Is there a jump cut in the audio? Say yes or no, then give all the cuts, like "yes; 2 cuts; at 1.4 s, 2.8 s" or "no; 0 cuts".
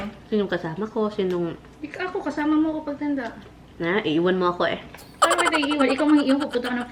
no; 0 cuts